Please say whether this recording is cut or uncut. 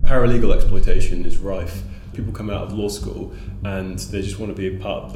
cut